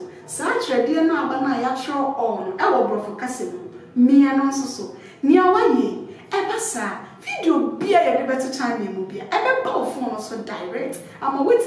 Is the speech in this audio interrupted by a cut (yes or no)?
no